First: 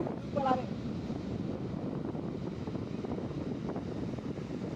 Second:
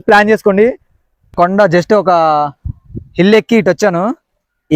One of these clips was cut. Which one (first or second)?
second